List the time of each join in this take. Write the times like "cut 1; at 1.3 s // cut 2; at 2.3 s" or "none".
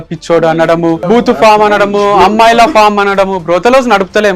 cut 1; at 1.0 s